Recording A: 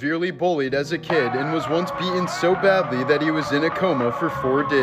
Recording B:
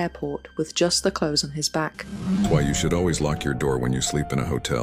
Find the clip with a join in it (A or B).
B